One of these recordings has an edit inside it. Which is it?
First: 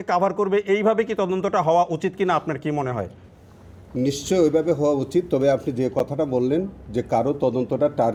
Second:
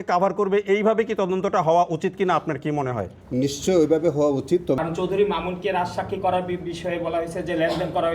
second; 2 cuts; at 3.2 s, 4.8 s

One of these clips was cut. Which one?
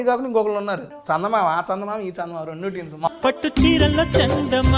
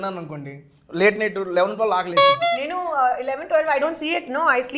first; 2 cuts; at 0.9 s, 3.1 s

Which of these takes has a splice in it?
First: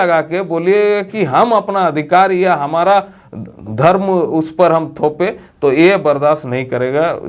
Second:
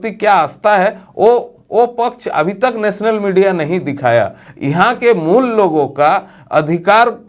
second; 1 cut; at 4.4 s

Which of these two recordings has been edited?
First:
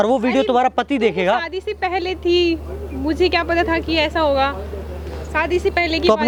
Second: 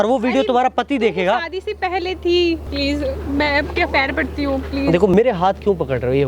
second; 2 cuts; at 2.7 s, 5.1 s

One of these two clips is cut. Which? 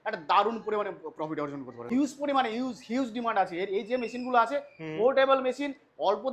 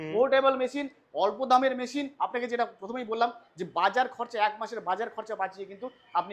first; 1 cut; at 1.8 s

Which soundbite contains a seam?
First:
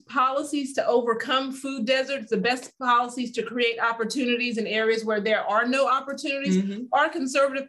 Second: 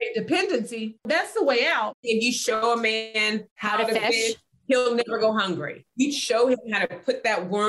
second; 3 cuts; at 1.0 s, 2.0 s, 5.8 s

